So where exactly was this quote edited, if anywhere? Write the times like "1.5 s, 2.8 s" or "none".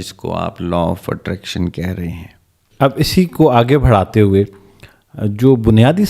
none